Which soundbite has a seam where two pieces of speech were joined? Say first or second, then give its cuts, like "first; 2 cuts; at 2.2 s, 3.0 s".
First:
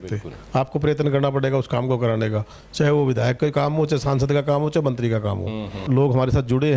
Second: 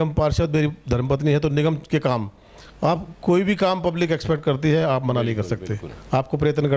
first; 1 cut; at 5.8 s